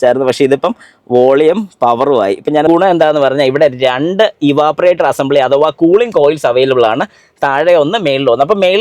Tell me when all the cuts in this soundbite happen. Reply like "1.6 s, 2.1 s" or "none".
2.7 s